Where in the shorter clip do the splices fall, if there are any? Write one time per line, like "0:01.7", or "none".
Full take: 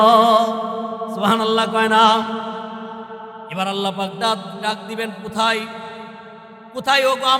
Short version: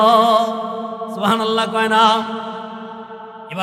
none